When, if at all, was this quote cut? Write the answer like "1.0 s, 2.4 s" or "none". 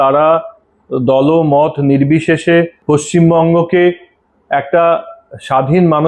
2.8 s

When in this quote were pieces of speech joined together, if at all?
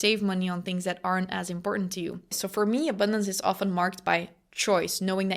2.3 s

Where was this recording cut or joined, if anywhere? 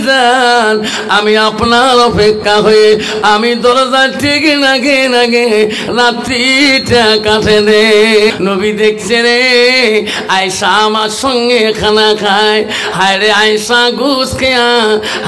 8.3 s

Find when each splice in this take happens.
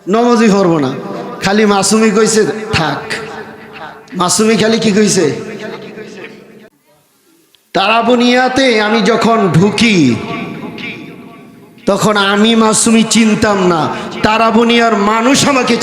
6.7 s

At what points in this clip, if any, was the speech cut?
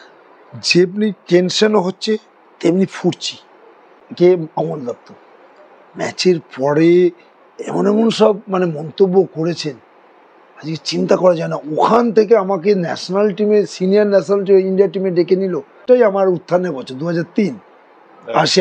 4.0 s, 15.8 s

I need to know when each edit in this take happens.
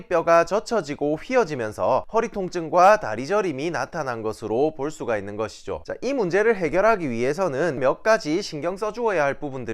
5.8 s, 7.8 s

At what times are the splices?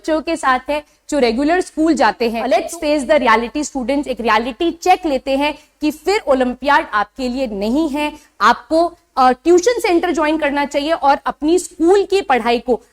2.4 s

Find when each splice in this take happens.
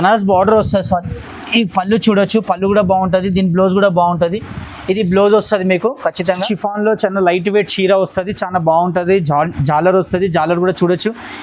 6.4 s

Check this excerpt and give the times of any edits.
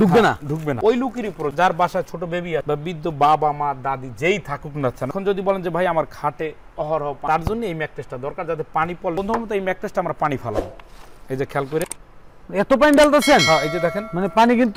none

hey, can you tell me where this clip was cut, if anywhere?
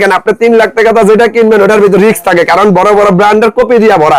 none

